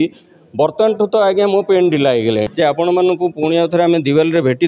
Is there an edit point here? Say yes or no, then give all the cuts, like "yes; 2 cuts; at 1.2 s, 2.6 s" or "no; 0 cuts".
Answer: yes; 1 cut; at 2.5 s